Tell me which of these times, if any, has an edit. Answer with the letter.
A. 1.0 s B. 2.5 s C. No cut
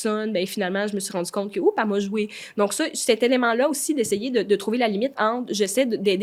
C